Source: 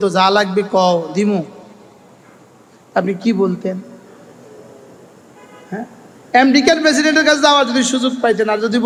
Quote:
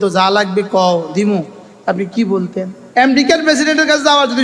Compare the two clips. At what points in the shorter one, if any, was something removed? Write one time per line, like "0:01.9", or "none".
0:01.6
0:02.8